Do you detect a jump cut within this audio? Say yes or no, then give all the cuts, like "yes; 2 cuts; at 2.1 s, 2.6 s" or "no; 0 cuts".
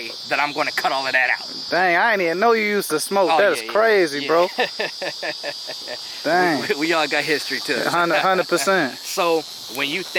no; 0 cuts